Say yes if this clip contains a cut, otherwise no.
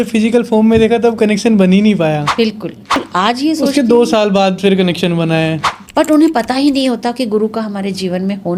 yes